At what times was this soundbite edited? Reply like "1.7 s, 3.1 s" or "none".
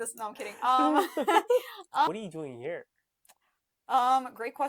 2.1 s